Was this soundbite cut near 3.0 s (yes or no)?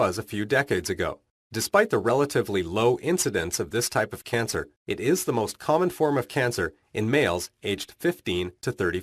no